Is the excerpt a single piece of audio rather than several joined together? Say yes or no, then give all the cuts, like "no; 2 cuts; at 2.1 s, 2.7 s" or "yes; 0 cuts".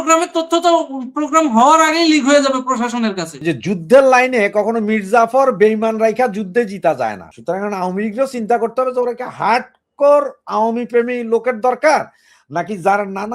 no; 2 cuts; at 3.3 s, 7.3 s